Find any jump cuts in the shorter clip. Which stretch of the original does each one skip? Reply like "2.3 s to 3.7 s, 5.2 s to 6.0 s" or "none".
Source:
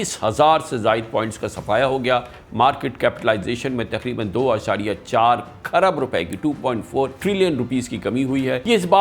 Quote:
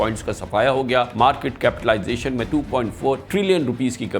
2.3 s to 2.5 s, 3.8 s to 6.4 s

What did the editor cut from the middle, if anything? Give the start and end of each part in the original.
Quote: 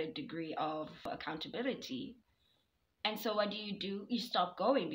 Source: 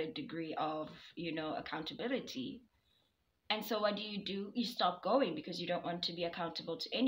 1.1 s to 1.5 s

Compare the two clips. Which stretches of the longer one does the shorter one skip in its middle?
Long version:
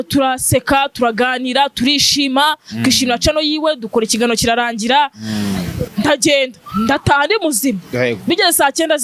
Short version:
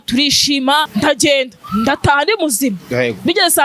2.6 s to 5.9 s

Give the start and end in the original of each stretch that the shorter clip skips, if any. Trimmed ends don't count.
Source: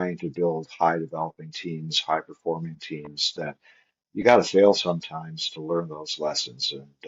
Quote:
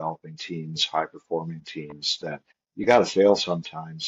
3.7 s to 3.9 s

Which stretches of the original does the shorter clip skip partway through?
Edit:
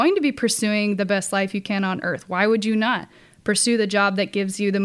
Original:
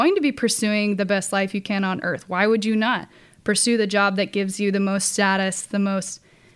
none

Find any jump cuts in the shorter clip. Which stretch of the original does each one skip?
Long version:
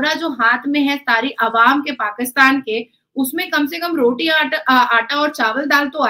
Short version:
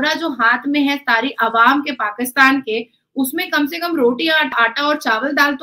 4.5 s to 4.9 s

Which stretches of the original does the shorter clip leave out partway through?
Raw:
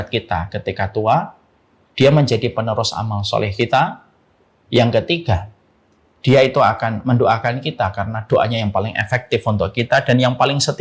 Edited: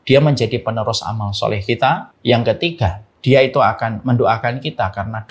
4.0 s to 4.6 s, 5.5 s to 6.1 s

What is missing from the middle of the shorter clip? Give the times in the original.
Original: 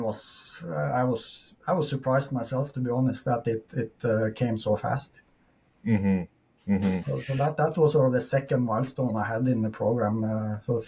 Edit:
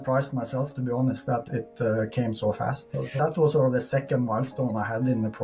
3.4 s to 3.7 s, 5.4 s to 7.5 s

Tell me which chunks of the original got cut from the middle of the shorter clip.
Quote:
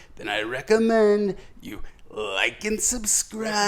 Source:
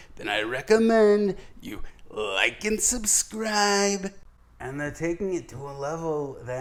none

